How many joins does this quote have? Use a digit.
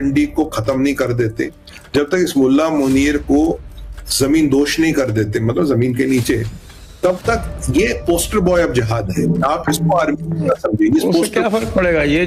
0